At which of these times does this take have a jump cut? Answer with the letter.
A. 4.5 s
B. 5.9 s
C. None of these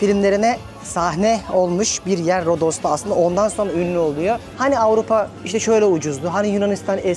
A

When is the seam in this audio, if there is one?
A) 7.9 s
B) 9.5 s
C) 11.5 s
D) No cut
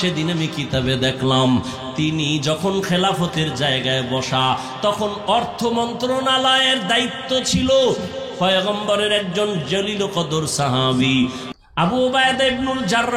C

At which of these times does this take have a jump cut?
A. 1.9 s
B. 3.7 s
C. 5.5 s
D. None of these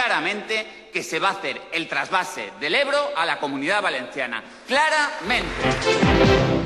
C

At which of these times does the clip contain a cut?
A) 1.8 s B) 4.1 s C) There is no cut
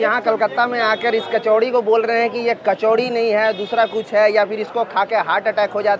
C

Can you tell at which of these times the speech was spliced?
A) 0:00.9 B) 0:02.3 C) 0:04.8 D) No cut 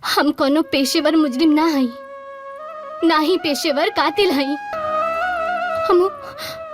C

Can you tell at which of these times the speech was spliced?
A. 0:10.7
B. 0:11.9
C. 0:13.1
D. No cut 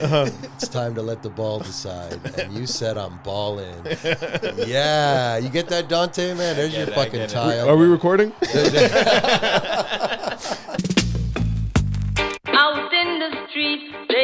A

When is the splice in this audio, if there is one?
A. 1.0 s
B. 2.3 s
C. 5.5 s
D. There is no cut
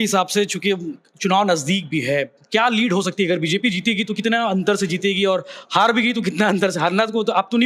D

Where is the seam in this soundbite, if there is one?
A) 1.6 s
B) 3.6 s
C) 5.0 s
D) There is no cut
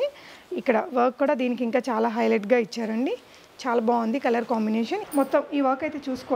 C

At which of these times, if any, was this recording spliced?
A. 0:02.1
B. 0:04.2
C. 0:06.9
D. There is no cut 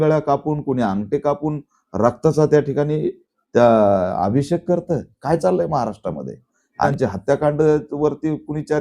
C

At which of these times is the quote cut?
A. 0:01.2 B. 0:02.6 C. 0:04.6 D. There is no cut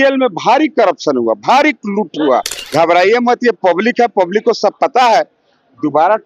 B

